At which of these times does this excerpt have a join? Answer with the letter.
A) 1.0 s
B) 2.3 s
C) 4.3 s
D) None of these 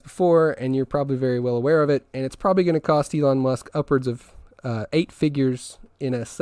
D